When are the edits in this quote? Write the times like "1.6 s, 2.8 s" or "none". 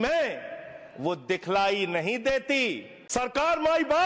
2.9 s